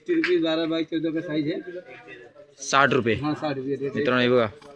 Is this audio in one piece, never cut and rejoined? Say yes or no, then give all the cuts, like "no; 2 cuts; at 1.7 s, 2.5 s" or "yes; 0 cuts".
yes; 0 cuts